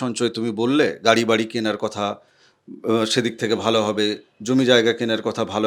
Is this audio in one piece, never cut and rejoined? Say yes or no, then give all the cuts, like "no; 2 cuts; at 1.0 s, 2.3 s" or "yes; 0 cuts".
yes; 0 cuts